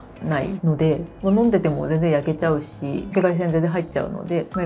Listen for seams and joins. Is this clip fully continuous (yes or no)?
yes